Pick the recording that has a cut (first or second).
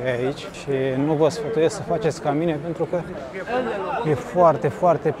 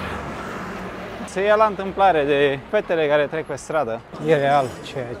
second